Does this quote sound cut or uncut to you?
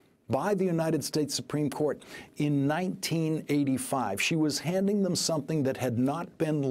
uncut